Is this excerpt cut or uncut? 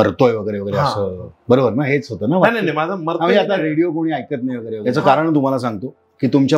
cut